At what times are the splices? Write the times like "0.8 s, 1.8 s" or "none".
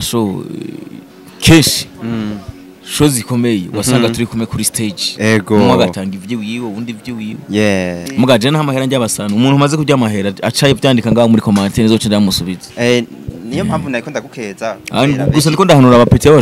8.0 s